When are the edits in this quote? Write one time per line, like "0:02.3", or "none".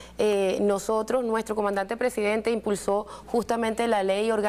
none

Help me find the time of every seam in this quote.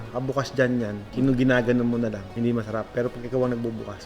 0:01.0
0:02.2

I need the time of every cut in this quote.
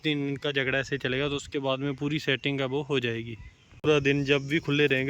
0:03.9

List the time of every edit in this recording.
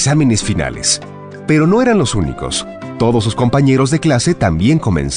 none

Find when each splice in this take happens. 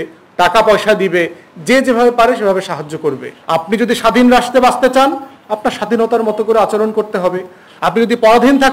0:03.3

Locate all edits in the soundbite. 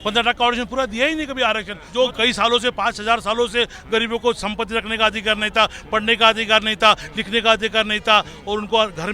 0:01.8

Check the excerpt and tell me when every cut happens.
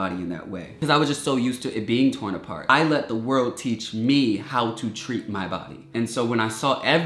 0:00.8
0:02.7
0:05.9

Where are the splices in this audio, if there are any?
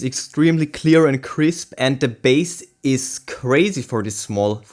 none

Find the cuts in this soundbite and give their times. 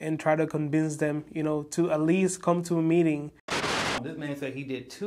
0:03.8

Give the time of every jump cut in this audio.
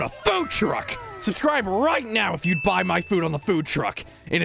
0:01.0

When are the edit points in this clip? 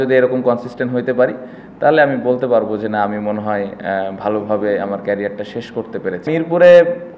0:06.2

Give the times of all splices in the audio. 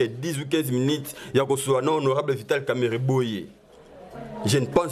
none

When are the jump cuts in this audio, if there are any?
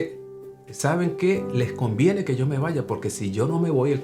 none

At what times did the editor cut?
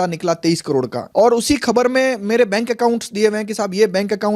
0:01.0

